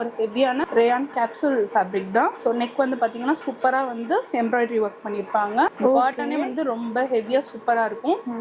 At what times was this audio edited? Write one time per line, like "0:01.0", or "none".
0:02.4
0:05.7